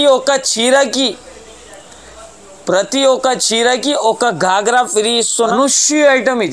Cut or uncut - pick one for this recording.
cut